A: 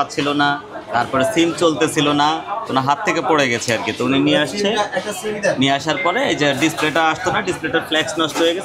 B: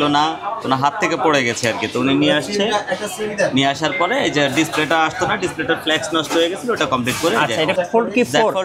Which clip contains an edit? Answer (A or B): B